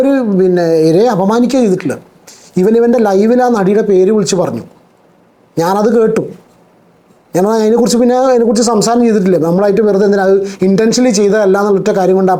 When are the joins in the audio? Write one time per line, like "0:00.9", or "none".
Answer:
none